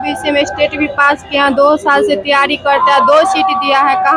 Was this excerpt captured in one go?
yes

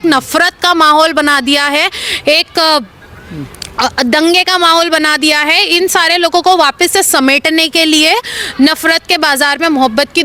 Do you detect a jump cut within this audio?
no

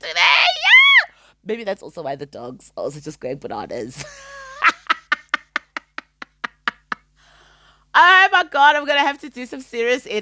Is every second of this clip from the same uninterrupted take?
yes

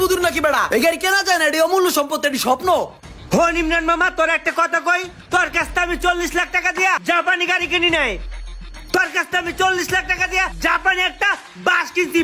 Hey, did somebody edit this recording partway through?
no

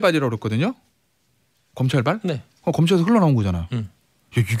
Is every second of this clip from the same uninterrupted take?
yes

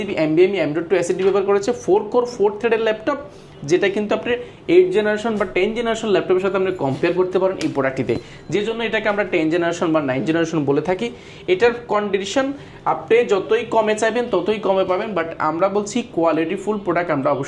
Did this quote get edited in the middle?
no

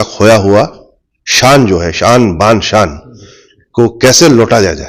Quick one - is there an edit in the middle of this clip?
no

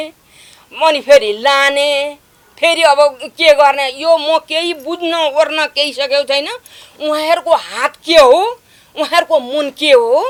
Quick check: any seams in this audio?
no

